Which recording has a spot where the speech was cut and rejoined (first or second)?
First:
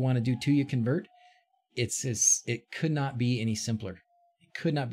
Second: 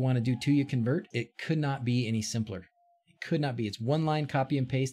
second